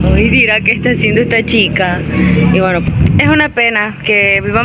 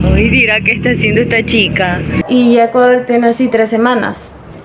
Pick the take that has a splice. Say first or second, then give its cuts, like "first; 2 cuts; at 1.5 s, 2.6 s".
second; 1 cut; at 2.2 s